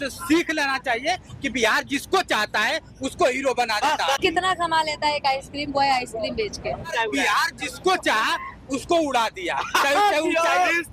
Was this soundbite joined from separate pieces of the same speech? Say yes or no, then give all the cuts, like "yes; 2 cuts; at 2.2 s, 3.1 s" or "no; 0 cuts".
yes; 2 cuts; at 4.2 s, 6.9 s